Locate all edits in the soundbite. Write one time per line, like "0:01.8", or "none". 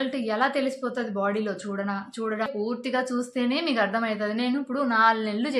0:02.5